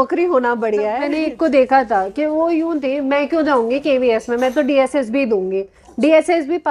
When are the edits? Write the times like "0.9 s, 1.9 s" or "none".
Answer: 1.1 s